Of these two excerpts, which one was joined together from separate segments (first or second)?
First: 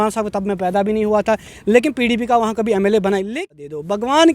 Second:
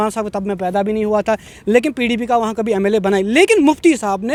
first